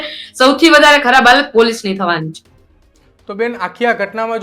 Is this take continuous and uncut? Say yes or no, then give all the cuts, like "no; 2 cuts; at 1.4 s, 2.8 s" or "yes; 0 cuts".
yes; 0 cuts